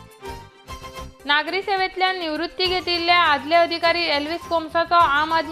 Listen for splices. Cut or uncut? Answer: cut